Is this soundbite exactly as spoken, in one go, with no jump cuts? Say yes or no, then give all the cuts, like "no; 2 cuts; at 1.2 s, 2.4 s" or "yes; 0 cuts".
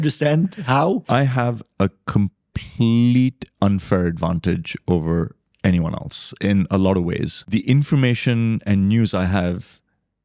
no; 2 cuts; at 1.0 s, 7.3 s